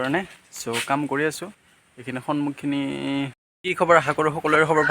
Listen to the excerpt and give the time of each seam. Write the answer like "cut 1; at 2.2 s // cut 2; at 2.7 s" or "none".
cut 1; at 3.5 s